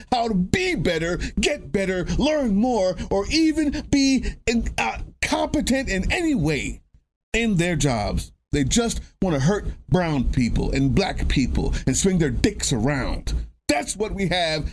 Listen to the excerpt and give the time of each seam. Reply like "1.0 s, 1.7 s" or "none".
13.5 s